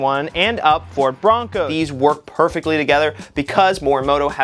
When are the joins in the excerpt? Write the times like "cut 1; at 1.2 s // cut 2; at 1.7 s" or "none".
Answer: cut 1; at 1.7 s